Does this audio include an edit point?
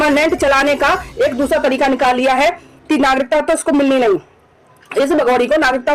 no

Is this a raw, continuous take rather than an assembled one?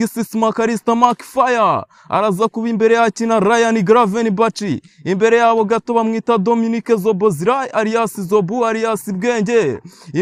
yes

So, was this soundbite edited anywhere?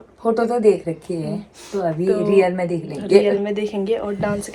no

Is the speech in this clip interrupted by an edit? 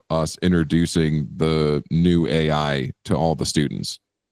no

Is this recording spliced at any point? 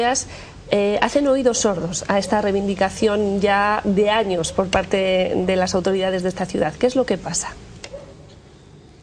no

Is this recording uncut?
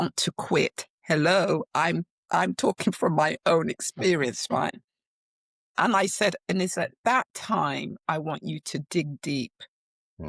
yes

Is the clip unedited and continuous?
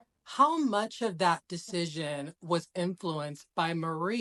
yes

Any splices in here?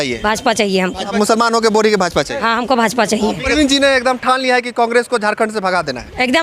yes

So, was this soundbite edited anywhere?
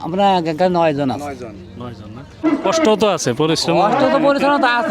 yes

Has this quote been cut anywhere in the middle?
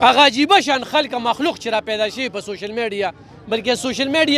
no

